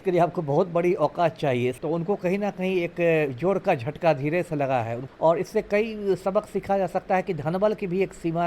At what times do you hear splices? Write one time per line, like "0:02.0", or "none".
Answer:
0:01.8
0:05.0